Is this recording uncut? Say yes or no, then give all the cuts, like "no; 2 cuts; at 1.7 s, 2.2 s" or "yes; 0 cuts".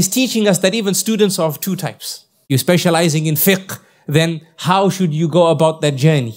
no; 1 cut; at 2.4 s